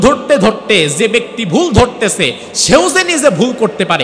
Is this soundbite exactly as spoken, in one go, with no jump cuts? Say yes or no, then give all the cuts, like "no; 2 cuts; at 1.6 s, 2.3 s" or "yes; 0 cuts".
yes; 0 cuts